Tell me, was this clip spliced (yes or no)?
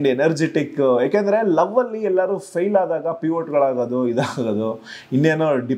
no